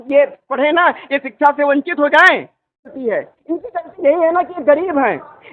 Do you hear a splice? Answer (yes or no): yes